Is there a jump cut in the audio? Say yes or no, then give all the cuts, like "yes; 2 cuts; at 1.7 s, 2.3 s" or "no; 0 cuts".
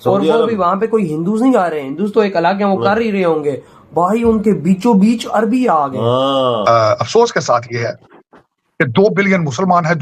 yes; 1 cut; at 6.6 s